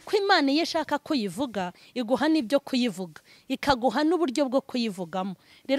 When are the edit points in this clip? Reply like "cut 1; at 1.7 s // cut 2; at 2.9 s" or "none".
none

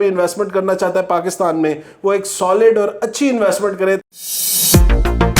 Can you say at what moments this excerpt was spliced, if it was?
cut 1; at 4.0 s

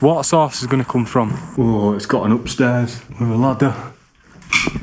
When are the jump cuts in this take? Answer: cut 1; at 1.4 s // cut 2; at 3.0 s

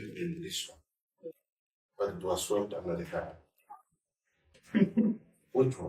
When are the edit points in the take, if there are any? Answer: cut 1; at 4.6 s

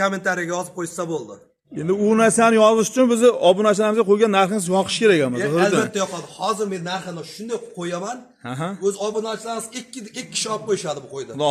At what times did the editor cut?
none

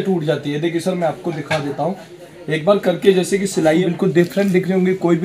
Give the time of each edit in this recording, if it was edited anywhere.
cut 1; at 3.8 s

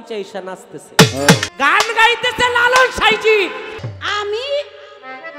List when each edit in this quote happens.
cut 1; at 1.5 s // cut 2; at 3.9 s

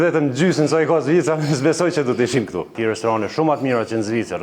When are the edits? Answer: cut 1; at 2.6 s

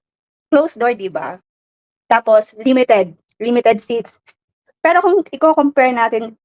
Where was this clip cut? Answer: none

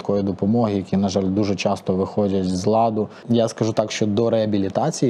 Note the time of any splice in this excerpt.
cut 1; at 3.2 s

